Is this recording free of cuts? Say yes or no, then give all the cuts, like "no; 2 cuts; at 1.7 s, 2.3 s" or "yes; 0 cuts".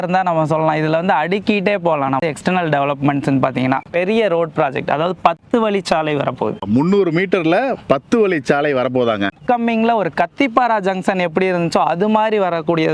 no; 2 cuts; at 3.8 s, 9.3 s